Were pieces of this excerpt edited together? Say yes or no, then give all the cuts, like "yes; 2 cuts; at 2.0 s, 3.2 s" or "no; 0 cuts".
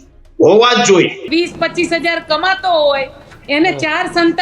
yes; 1 cut; at 1.3 s